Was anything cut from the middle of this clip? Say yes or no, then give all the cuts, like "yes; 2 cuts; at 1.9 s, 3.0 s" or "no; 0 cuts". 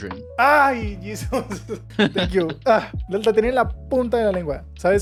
no; 0 cuts